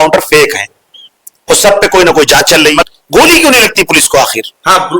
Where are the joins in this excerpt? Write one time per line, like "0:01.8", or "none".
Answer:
0:02.9